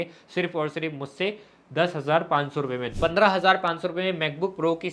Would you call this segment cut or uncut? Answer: cut